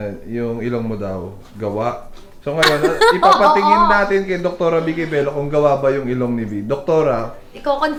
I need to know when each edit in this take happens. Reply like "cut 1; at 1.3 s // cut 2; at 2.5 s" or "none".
none